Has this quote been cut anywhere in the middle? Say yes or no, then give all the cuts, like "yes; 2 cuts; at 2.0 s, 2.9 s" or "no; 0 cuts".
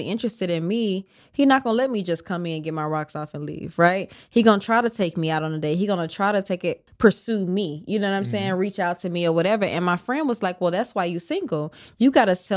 yes; 1 cut; at 6.8 s